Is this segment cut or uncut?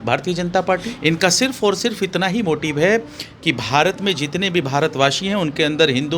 cut